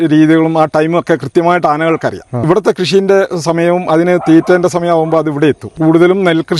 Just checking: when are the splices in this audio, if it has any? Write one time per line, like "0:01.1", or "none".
0:02.4
0:05.8